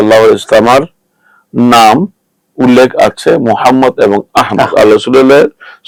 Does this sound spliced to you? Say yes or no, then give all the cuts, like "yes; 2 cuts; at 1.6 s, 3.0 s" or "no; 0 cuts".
no; 0 cuts